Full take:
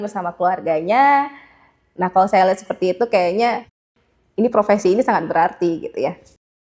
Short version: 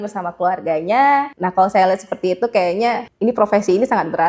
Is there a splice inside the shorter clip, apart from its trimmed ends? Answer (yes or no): yes